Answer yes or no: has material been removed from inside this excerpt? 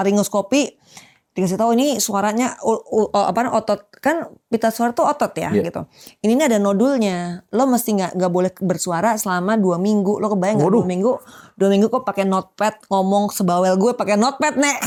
no